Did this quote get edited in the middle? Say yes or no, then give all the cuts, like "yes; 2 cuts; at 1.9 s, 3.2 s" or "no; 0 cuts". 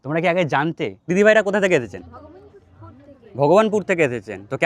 yes; 1 cut; at 1.2 s